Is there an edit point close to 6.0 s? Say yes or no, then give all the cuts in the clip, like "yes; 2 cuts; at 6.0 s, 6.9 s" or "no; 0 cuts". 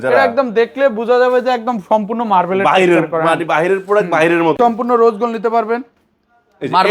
no; 1 cut; at 4.6 s